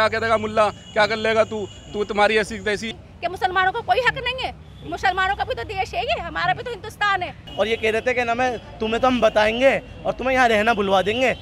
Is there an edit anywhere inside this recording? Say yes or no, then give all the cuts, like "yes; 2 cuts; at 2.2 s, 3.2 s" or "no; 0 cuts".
yes; 2 cuts; at 2.9 s, 7.4 s